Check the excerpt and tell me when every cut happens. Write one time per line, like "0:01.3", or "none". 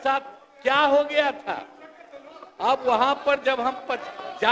none